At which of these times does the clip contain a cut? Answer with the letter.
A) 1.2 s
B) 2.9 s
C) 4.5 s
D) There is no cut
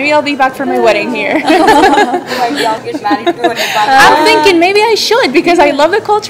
B